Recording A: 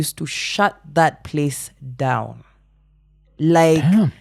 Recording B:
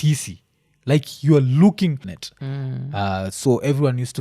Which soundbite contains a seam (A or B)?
B